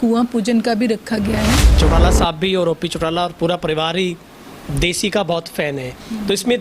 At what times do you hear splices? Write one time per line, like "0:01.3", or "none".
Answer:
0:01.7